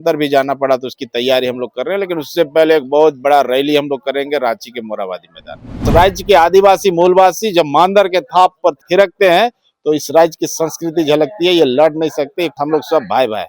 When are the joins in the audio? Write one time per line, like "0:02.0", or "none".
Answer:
0:05.8
0:12.6